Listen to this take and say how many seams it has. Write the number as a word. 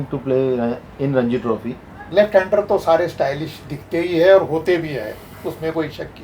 one